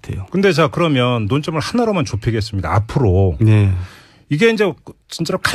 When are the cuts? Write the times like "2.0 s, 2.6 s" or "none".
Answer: 4.3 s